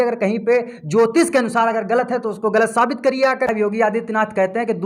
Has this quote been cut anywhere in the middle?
yes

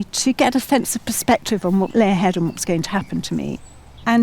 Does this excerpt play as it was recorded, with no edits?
no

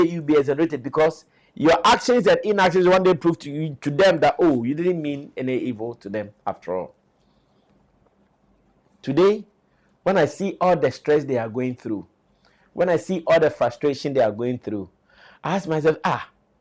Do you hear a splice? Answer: no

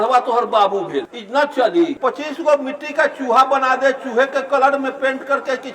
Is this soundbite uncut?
no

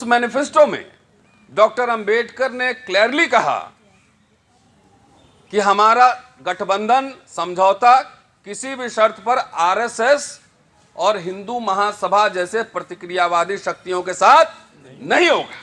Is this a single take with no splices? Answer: yes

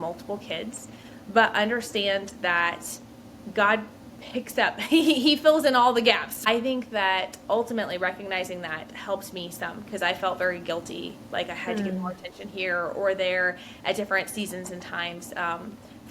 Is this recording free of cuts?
no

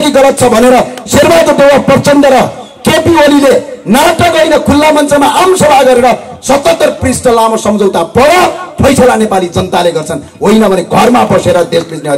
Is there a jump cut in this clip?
no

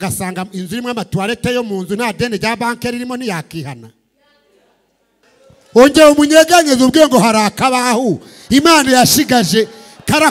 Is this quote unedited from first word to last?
no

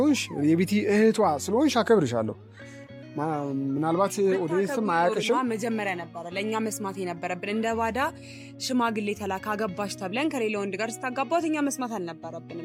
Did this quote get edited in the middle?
no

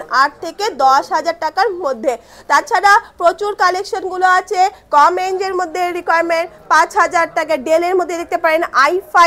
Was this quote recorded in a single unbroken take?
yes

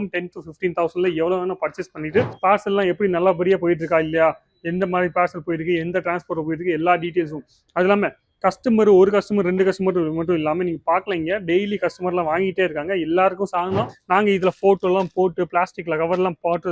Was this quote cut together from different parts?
yes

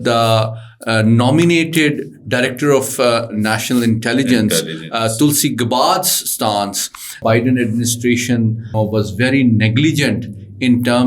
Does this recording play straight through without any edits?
no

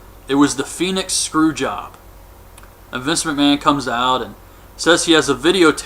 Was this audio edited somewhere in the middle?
yes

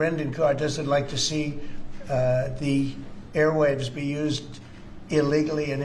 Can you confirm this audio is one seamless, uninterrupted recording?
yes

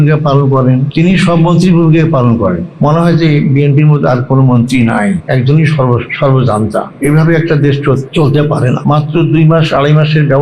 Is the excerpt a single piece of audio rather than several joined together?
no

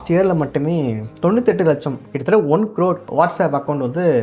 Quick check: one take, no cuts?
yes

